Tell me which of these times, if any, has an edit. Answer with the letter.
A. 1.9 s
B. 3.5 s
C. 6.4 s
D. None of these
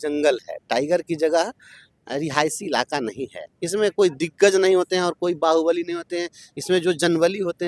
B